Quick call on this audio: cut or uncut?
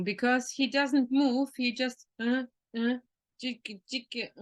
uncut